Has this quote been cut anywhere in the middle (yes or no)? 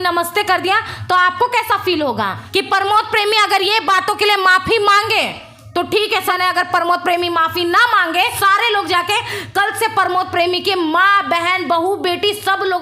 yes